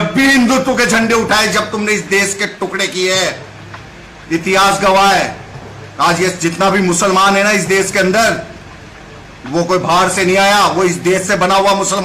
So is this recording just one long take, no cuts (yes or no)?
yes